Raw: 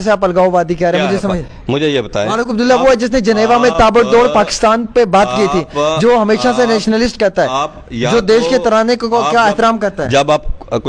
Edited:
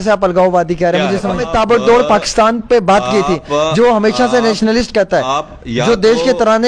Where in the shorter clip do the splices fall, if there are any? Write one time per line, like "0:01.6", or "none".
0:01.5